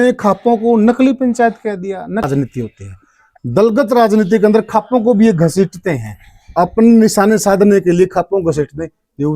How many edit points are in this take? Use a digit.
1